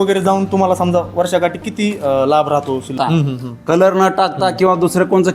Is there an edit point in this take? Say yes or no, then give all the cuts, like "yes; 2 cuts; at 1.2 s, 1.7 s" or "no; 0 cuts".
yes; 1 cut; at 2.9 s